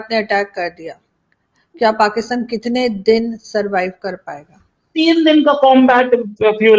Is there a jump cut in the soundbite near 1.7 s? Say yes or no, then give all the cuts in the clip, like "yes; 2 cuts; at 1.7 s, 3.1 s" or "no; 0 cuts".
no; 1 cut; at 4.9 s